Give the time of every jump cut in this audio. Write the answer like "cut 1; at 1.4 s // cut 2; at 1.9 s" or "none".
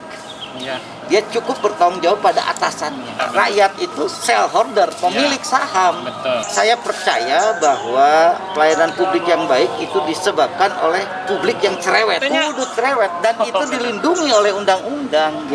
cut 1; at 3.2 s // cut 2; at 6.5 s // cut 3; at 12.2 s

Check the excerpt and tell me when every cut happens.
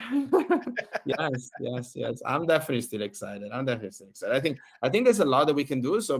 none

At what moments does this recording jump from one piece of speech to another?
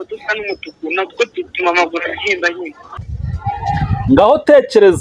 cut 1; at 2.8 s

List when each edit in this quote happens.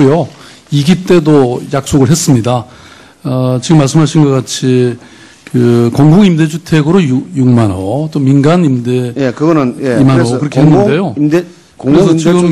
cut 1; at 11.2 s

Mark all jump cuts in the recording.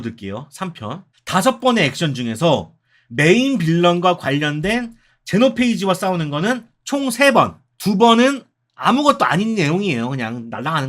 cut 1; at 1.1 s

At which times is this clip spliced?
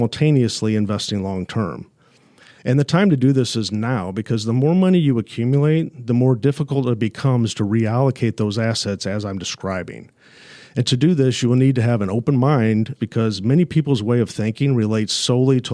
cut 1; at 13.0 s

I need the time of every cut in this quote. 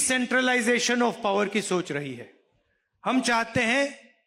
none

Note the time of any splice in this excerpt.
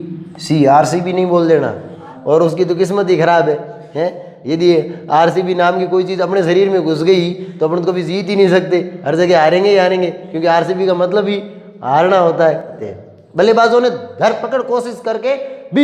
cut 1; at 2.1 s // cut 2; at 12.8 s

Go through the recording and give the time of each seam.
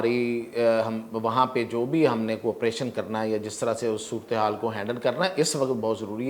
none

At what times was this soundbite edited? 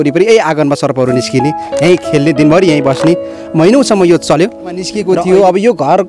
cut 1; at 4.9 s

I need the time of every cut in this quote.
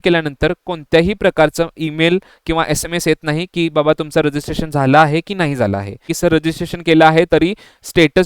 cut 1; at 6.1 s

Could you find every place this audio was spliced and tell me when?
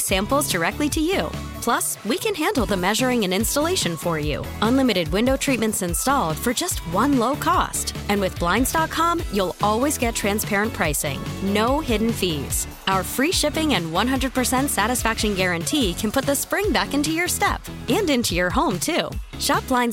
none

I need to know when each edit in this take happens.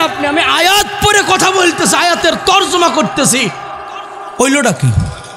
none

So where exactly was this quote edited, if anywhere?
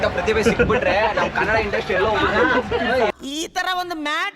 none

